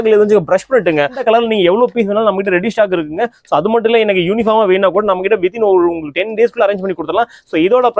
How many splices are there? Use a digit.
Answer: 1